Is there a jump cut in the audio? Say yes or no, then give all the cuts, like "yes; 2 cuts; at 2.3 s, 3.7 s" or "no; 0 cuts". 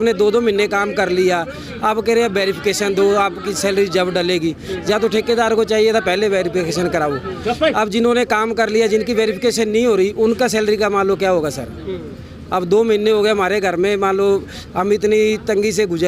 no; 0 cuts